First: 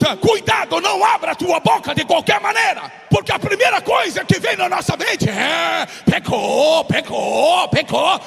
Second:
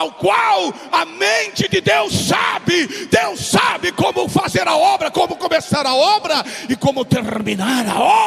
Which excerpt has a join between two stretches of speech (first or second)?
first